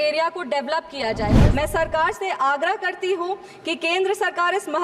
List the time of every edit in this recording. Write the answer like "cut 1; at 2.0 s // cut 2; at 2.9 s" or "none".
cut 1; at 1.3 s